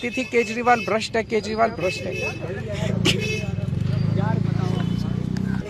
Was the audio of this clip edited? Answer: yes; 1 cut; at 2.8 s

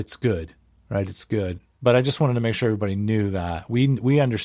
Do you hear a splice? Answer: yes; 1 cut; at 1.7 s

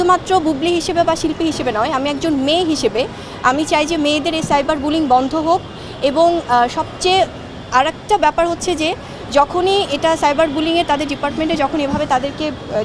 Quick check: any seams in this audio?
no; 0 cuts

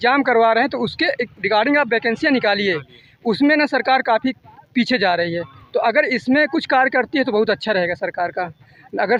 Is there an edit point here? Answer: no; 0 cuts

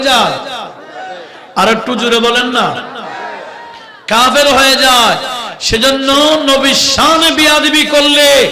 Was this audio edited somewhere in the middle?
no; 0 cuts

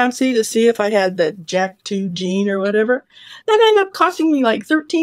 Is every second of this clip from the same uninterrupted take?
yes; 0 cuts

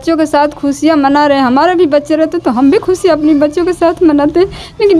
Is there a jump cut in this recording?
no; 0 cuts

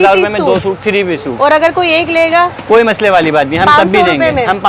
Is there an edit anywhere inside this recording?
no; 0 cuts

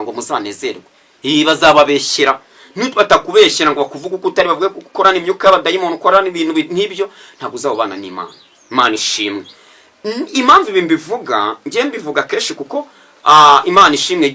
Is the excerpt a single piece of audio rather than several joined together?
yes; 0 cuts

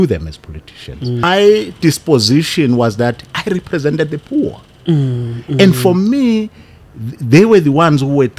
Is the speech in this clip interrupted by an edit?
yes; 1 cut; at 1.2 s

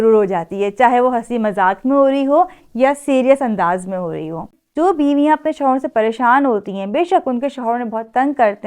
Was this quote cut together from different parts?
yes; 1 cut; at 4.6 s

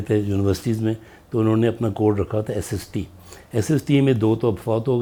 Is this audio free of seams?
yes; 0 cuts

